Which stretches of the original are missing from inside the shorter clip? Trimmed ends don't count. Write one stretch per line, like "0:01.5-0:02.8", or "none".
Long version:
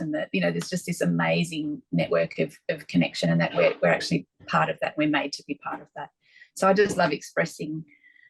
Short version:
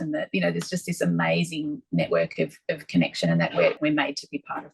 0:03.8-0:04.9